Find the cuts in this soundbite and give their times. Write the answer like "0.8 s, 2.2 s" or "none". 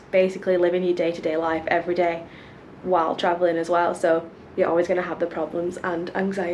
none